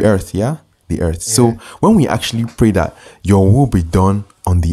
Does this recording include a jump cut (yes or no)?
no